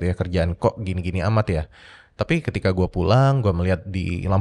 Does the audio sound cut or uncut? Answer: uncut